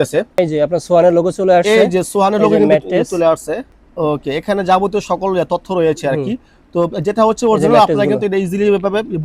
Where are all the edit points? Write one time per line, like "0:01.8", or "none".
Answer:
none